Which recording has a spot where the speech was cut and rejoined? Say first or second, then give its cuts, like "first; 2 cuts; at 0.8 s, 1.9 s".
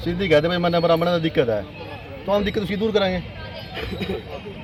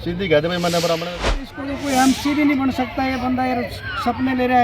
second; 1 cut; at 1.4 s